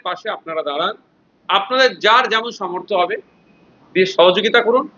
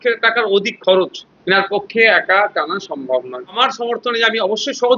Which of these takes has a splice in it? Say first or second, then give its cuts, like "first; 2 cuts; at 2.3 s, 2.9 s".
second; 2 cuts; at 1.3 s, 3.6 s